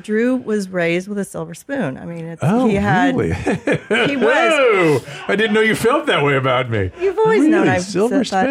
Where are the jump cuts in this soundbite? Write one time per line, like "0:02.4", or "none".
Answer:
none